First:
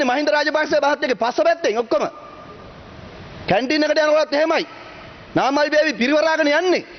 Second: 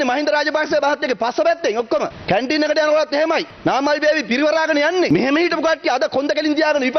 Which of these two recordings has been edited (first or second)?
second